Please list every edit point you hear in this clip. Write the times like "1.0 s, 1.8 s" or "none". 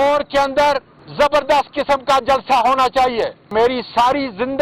3.4 s